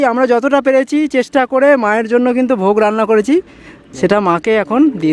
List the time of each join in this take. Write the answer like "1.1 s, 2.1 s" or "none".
none